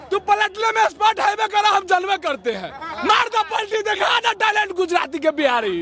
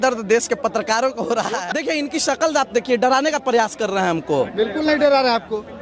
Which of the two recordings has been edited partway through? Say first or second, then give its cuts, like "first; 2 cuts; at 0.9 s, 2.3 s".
second; 1 cut; at 1.6 s